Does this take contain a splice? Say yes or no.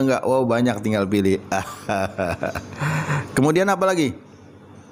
no